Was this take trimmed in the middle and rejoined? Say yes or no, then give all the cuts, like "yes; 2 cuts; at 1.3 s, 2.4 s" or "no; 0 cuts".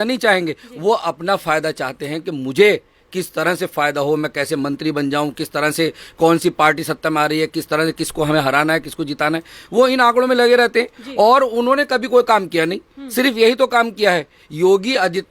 no; 0 cuts